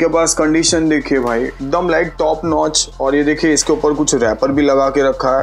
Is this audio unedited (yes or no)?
yes